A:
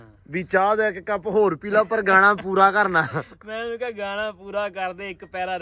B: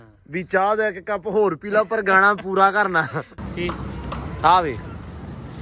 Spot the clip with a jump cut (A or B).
B